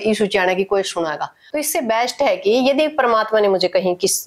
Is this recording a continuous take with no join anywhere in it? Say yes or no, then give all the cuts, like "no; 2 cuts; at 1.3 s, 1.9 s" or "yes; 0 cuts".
no; 1 cut; at 1.4 s